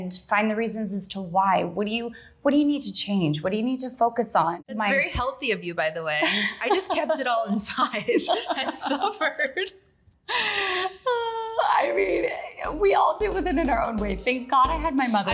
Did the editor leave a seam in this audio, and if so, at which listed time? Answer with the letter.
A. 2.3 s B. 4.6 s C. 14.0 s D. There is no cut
B